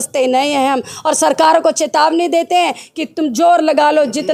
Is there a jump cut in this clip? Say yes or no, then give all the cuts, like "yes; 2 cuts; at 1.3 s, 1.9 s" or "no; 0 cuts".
no; 0 cuts